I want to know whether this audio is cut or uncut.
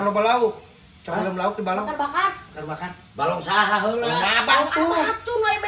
uncut